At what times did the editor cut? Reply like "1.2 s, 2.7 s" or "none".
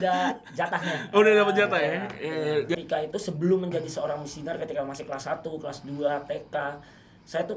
2.7 s